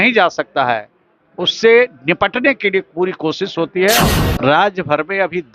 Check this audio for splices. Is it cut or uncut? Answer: cut